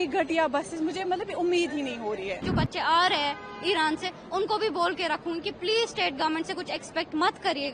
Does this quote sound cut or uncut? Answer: cut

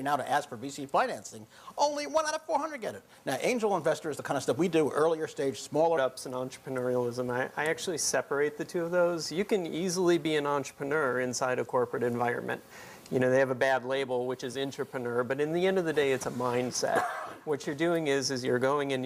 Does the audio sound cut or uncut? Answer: uncut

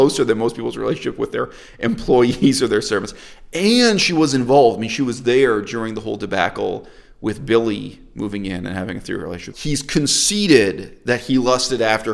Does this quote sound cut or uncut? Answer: cut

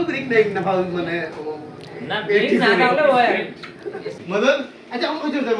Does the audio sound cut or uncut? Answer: cut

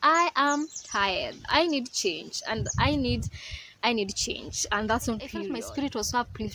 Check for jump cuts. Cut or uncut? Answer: cut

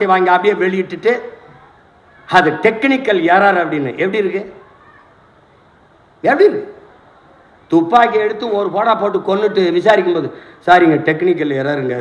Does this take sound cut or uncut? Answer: uncut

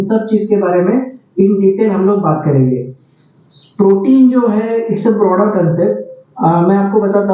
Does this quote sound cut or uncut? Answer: uncut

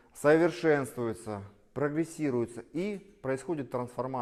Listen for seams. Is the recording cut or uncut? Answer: uncut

